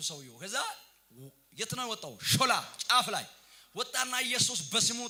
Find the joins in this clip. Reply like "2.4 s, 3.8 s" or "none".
none